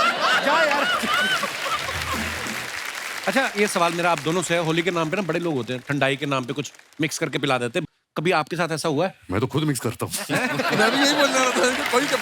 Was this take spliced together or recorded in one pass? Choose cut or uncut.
cut